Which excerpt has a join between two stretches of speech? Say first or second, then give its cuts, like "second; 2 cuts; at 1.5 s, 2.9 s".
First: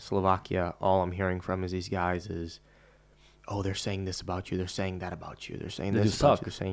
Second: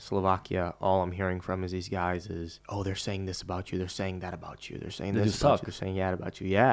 second; 1 cut; at 2.6 s